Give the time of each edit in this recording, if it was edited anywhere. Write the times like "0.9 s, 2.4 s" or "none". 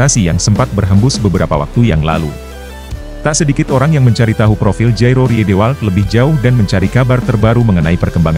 none